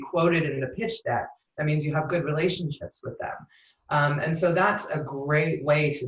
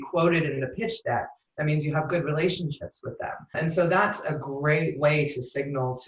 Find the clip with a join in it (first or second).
second